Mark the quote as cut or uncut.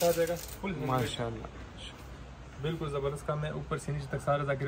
uncut